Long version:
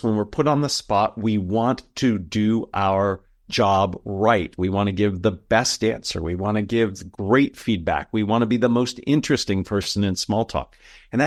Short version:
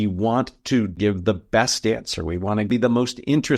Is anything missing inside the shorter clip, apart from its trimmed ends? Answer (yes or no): yes